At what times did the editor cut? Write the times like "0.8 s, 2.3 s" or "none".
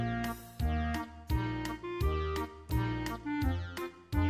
none